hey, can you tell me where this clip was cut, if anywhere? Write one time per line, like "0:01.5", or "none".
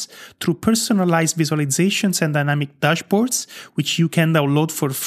none